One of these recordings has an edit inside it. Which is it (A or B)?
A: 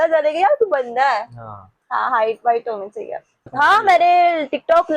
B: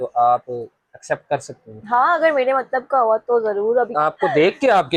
A